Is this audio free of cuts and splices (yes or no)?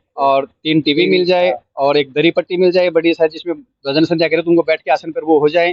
yes